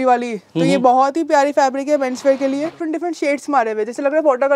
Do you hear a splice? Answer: yes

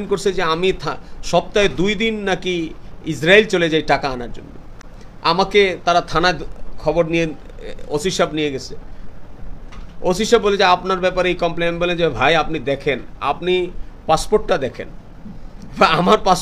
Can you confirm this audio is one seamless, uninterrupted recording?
yes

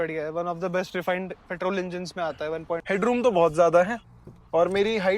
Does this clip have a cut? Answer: yes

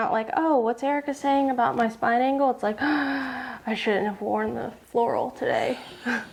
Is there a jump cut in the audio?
no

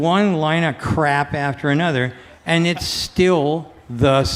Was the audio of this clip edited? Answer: no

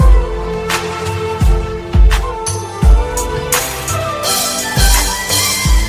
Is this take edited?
no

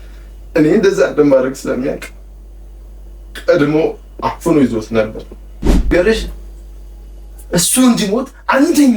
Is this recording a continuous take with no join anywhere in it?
no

